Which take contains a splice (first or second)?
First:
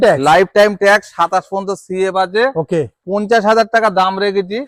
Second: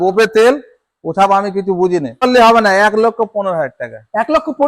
second